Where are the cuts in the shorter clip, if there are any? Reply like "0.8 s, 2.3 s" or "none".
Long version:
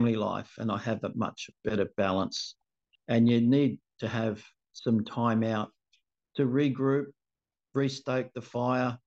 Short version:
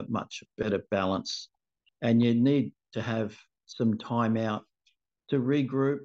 none